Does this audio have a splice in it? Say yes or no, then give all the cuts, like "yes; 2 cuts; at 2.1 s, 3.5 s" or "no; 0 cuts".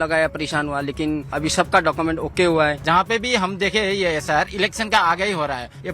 yes; 2 cuts; at 1.3 s, 2.8 s